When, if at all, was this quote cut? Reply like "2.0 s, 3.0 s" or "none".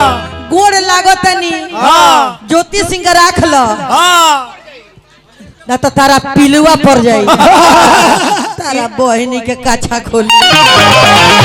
none